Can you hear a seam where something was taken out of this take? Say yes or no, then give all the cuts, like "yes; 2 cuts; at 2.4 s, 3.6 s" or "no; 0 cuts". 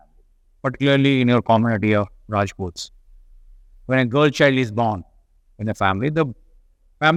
no; 0 cuts